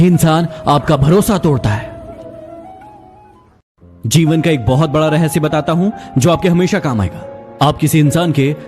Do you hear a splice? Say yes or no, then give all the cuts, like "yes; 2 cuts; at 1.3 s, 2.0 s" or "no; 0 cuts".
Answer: yes; 1 cut; at 3.7 s